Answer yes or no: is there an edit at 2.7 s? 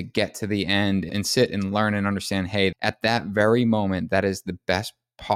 yes